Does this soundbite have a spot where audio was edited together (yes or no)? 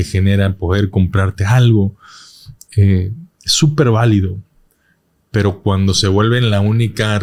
no